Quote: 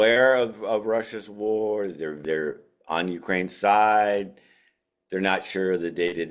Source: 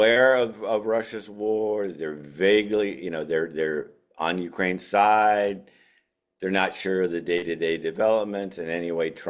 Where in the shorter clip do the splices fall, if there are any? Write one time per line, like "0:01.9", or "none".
0:02.2

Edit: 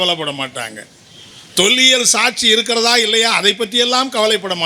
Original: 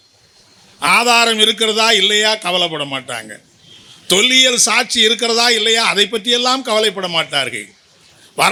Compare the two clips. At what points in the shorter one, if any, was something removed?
none

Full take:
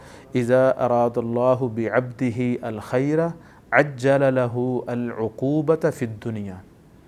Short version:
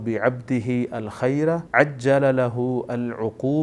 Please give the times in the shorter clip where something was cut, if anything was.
0:01.6

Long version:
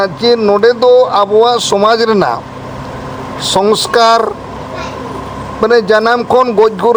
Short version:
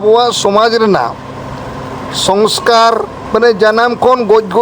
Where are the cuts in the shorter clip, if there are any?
0:03.2

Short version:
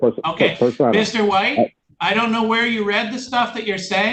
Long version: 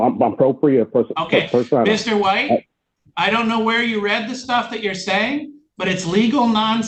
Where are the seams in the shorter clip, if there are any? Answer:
0:01.9

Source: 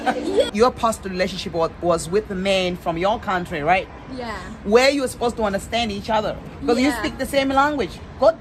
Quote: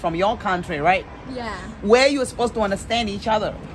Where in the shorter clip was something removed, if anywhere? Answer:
none

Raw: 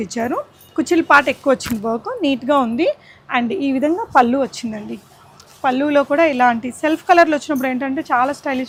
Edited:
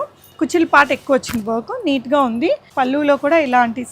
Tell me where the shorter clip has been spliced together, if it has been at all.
0:02.7

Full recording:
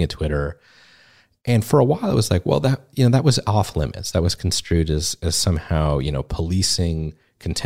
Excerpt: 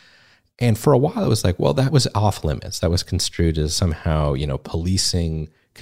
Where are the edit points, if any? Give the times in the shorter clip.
0:01.9
0:03.7

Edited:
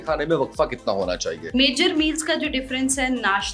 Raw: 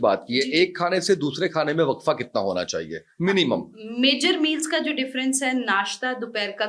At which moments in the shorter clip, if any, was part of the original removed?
0:01.4

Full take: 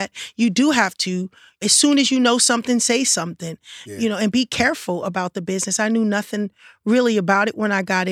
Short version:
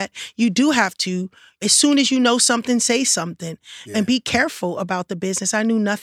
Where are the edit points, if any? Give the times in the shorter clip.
0:03.9

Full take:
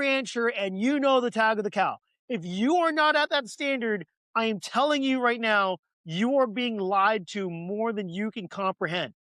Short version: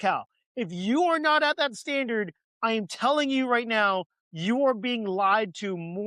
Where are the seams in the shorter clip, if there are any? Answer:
none

